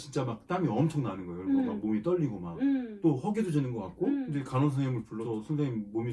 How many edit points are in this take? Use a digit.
3